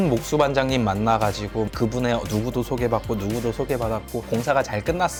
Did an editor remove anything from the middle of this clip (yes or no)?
no